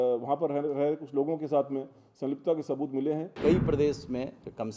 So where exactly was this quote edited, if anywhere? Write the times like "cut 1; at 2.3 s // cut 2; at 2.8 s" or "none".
cut 1; at 3.3 s